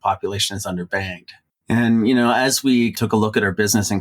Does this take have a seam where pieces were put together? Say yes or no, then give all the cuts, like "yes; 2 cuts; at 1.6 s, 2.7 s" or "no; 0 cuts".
yes; 2 cuts; at 1.4 s, 3.0 s